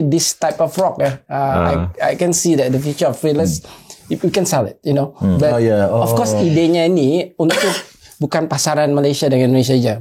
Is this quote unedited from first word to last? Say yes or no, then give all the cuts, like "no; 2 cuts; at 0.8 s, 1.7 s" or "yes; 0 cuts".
yes; 0 cuts